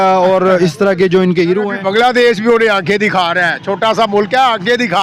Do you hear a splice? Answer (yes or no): yes